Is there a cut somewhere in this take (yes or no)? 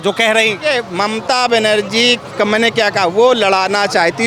yes